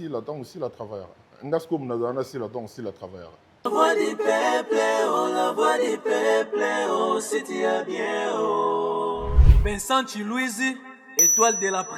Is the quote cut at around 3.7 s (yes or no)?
yes